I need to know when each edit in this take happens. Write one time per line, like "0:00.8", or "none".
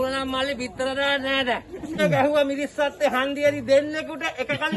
0:02.0